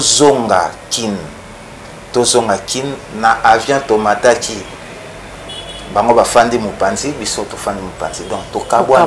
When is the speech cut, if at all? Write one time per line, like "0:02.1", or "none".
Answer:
none